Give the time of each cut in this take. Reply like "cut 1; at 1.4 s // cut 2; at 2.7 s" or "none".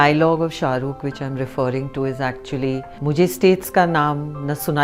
cut 1; at 2.9 s